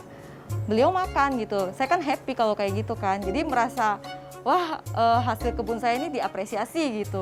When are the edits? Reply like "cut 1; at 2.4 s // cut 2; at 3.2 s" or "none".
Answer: none